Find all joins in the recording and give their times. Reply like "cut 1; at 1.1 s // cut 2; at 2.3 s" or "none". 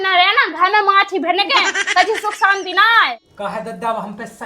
cut 1; at 3.3 s